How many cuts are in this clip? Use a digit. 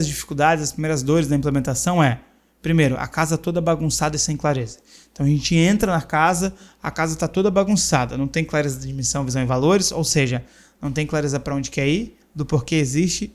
0